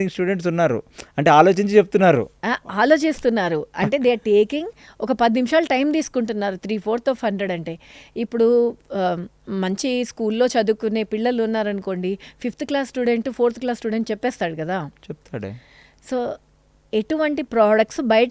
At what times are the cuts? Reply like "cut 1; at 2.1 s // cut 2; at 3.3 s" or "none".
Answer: none